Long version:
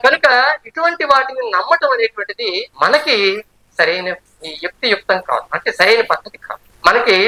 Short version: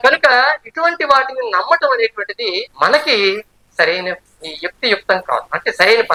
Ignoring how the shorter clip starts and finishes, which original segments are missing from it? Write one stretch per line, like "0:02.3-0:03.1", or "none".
none